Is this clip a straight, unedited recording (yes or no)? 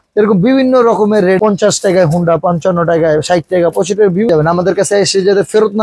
no